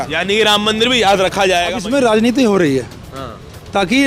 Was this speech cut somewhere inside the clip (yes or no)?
yes